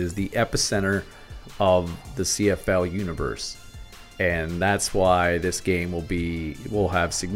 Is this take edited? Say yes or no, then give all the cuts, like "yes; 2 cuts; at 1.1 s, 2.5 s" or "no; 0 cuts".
no; 0 cuts